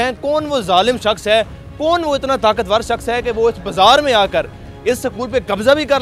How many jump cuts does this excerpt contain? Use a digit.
0